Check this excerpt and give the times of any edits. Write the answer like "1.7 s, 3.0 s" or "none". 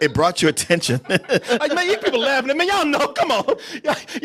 none